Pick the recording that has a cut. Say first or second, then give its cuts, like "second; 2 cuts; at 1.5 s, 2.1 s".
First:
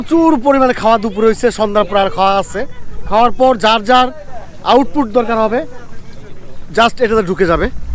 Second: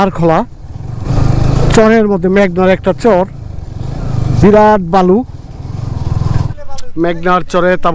second; 2 cuts; at 1.1 s, 6.5 s